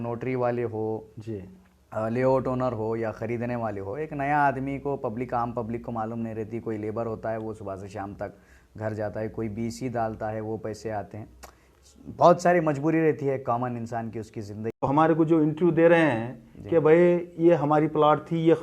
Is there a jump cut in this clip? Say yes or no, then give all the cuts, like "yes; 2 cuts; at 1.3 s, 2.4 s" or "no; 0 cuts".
yes; 1 cut; at 14.9 s